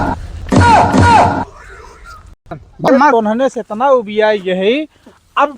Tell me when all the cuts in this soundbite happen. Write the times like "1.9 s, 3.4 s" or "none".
2.9 s